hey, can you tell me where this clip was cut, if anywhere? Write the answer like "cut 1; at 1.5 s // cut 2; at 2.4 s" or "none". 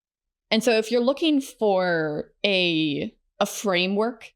cut 1; at 3.2 s